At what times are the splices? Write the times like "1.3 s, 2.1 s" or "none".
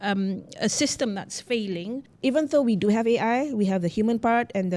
2.1 s